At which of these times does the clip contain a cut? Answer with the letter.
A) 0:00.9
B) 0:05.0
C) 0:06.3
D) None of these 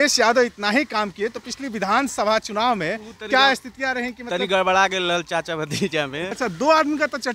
C